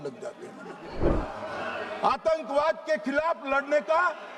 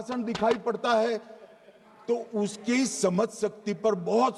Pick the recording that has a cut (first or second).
first